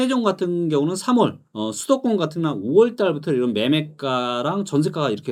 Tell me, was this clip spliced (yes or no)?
no